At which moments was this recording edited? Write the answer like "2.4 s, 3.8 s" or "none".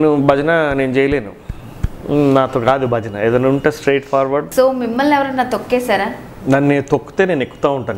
4.5 s